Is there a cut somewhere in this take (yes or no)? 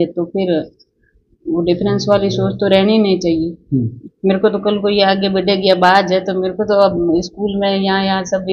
yes